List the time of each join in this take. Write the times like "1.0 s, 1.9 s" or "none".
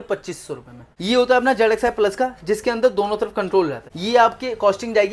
0.8 s, 3.9 s